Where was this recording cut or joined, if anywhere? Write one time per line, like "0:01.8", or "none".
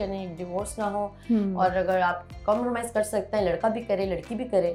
none

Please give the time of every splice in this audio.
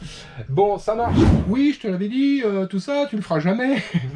0:01.3

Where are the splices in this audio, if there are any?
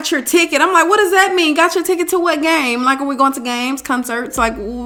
none

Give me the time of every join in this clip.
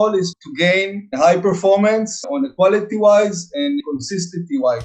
0:02.2
0:03.8

